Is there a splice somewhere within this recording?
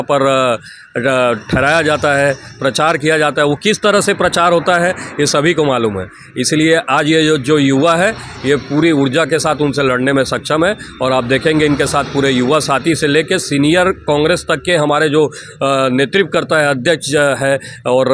no; 0 cuts

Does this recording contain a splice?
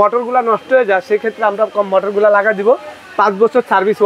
no; 0 cuts

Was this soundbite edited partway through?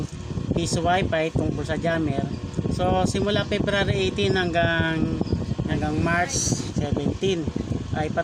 yes; 2 cuts; at 5.7 s, 6.7 s

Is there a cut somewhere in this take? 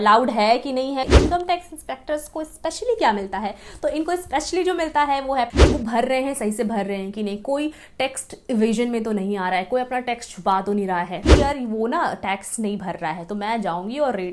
yes; 3 cuts; at 1.1 s, 5.6 s, 11.2 s

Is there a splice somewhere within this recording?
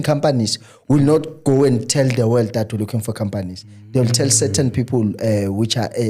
no; 0 cuts

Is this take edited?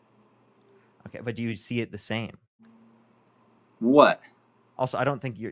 no; 0 cuts

